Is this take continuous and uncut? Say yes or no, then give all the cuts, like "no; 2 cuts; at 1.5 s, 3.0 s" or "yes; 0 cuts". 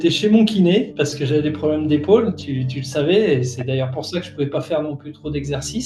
yes; 0 cuts